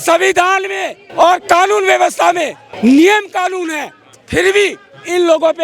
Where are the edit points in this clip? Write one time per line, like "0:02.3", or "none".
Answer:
0:01.0
0:02.6

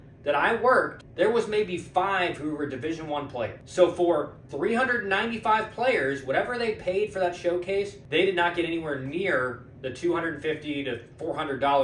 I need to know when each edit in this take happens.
0:01.0
0:03.6
0:04.4
0:08.0

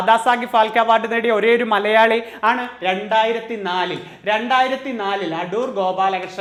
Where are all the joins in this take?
none

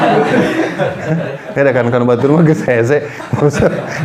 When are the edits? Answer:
none

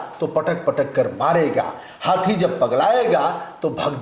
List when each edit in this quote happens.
none

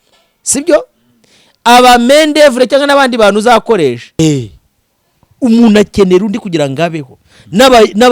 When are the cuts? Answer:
0:04.2

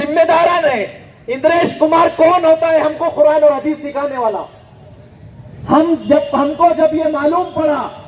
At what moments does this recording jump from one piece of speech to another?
none

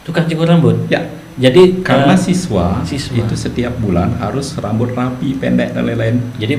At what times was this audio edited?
none

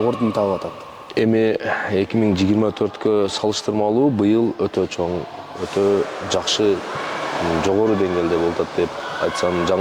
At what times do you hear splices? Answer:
none

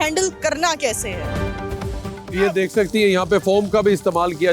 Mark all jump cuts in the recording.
none

